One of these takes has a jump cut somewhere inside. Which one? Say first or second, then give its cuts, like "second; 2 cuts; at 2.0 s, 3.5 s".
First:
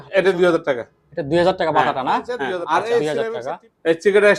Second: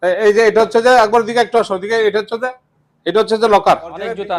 first; 1 cut; at 3.0 s